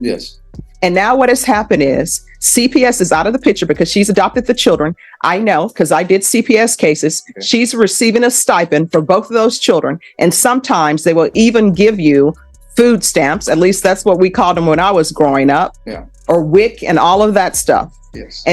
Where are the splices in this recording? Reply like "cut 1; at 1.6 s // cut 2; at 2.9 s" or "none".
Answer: cut 1; at 11.7 s

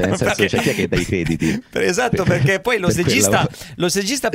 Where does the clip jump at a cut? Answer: none

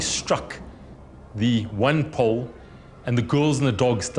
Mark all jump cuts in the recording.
none

